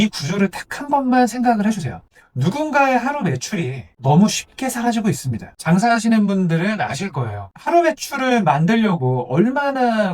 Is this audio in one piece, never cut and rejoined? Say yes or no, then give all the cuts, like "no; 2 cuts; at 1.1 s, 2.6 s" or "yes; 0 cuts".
no; 1 cut; at 5.5 s